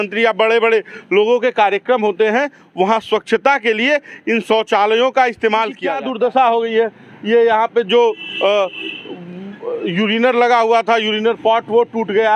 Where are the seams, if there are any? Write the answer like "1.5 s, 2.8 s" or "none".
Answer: 5.9 s